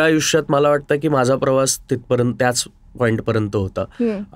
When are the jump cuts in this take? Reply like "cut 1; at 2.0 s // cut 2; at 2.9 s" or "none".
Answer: none

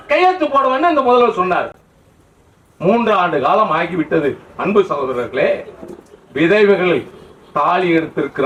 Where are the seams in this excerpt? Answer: none

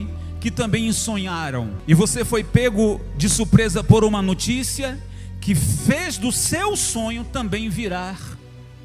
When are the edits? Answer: cut 1; at 1.7 s

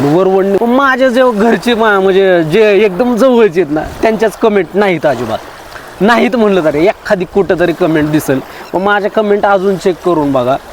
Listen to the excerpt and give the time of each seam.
none

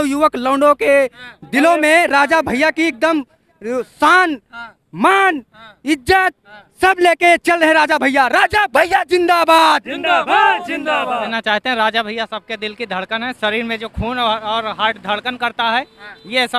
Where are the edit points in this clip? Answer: cut 1; at 11.3 s

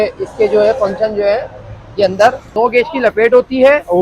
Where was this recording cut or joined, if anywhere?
cut 1; at 2.5 s

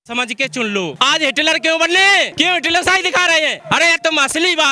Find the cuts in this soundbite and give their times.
cut 1; at 0.9 s // cut 2; at 2.3 s // cut 3; at 3.6 s

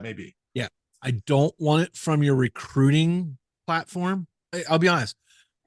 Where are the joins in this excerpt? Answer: cut 1; at 3.5 s // cut 2; at 4.4 s

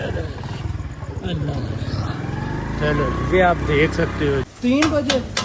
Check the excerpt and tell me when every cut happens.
cut 1; at 4.5 s

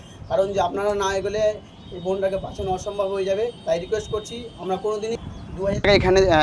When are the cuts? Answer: cut 1; at 5.2 s

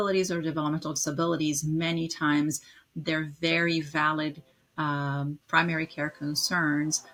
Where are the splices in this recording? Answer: none

